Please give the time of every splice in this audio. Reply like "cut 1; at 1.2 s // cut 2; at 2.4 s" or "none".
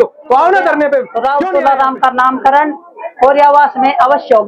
cut 1; at 1.1 s